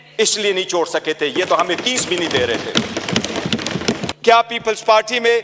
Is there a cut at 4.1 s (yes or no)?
yes